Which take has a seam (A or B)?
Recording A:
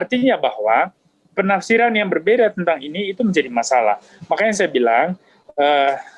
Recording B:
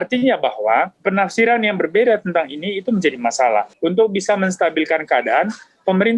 B